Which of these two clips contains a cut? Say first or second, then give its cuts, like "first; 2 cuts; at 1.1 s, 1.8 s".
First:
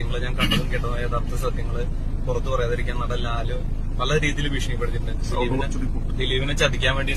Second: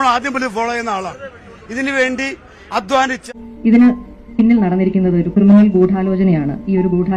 second; 1 cut; at 3.2 s